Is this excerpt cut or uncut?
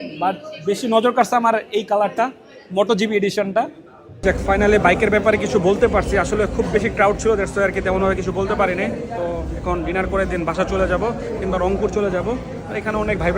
uncut